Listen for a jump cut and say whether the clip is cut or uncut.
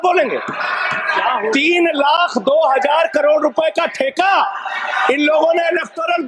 uncut